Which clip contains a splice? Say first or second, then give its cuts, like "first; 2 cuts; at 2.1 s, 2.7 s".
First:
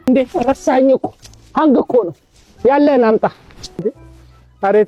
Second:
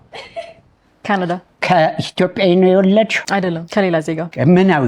second; 2 cuts; at 1.5 s, 3.7 s